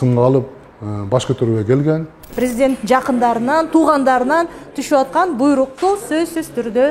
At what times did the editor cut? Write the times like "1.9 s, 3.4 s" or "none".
2.2 s